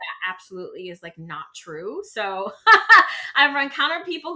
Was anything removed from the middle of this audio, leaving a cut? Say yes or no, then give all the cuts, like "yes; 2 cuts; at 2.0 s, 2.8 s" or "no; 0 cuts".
no; 0 cuts